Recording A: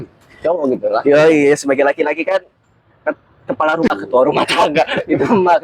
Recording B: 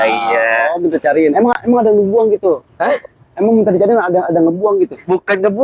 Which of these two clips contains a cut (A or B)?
A